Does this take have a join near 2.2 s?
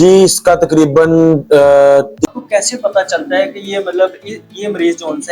yes; 1 cut; at 2.2 s

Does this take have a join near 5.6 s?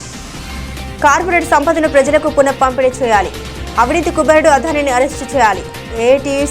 no; 1 cut; at 1.0 s

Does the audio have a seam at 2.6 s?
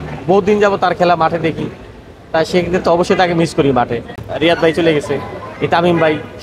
no; 1 cut; at 4.2 s

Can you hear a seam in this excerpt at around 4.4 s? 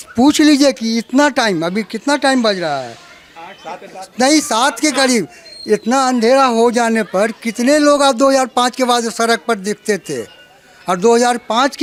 no; 0 cuts

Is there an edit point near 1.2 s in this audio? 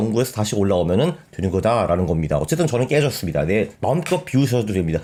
no; 0 cuts

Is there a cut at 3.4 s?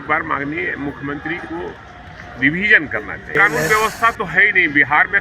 yes; 1 cut; at 3.4 s

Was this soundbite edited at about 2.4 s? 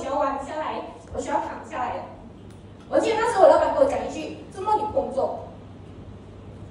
no; 0 cuts

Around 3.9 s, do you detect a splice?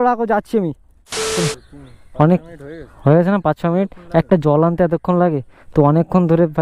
no; 1 cut; at 1.3 s

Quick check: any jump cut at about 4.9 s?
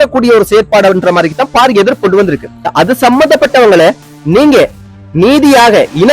no; 1 cut; at 2.7 s

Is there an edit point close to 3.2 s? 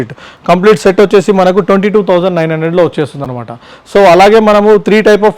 no; 0 cuts

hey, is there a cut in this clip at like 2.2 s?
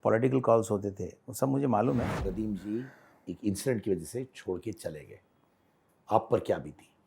yes; 1 cut; at 2.2 s

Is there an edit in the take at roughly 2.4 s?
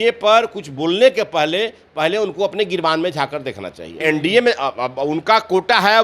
no; 1 cut; at 3.9 s

